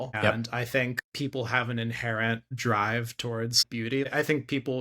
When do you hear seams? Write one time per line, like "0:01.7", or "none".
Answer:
0:01.0
0:04.1